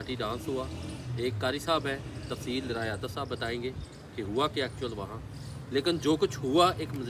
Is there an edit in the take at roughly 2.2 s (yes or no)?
no